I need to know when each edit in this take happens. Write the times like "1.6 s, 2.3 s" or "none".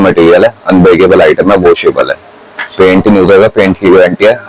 none